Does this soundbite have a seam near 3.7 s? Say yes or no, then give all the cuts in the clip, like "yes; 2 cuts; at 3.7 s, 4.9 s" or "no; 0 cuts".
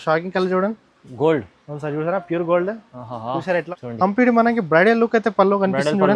yes; 1 cut; at 3.7 s